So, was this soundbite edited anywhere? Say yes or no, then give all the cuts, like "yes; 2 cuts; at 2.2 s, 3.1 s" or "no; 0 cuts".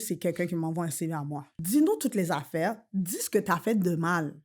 yes; 1 cut; at 1.5 s